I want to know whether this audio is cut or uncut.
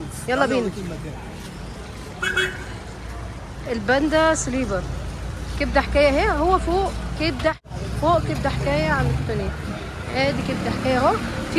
cut